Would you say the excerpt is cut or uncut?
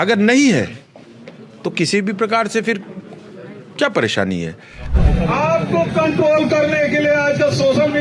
cut